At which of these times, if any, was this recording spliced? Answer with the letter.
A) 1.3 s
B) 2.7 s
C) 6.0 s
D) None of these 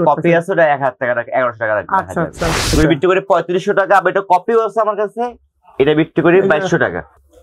B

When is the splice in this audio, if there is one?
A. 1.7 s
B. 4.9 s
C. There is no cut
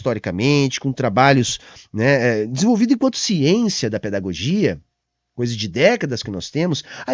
C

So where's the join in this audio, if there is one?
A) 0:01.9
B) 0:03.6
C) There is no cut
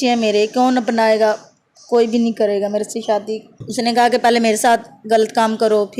B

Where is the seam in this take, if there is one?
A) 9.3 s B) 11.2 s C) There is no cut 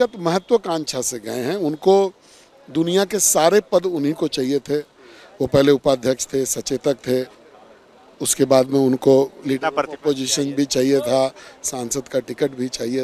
C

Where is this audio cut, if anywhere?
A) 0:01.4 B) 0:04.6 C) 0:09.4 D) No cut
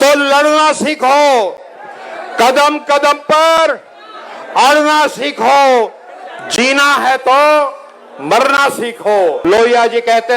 C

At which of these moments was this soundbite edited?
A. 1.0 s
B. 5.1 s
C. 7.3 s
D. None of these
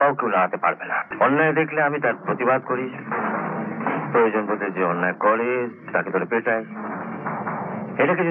A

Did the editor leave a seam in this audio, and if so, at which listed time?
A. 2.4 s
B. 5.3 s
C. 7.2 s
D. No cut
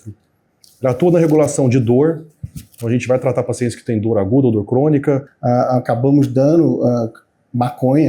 B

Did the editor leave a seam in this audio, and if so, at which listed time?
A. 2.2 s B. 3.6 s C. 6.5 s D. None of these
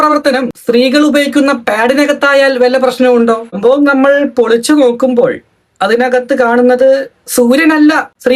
B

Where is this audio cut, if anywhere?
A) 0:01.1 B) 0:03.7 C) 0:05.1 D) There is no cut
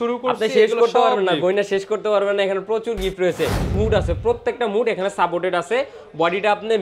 B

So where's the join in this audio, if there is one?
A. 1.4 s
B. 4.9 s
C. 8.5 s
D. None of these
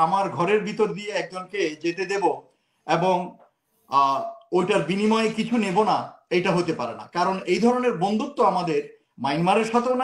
D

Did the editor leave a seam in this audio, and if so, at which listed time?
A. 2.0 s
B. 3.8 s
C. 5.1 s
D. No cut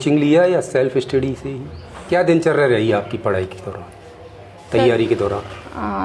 A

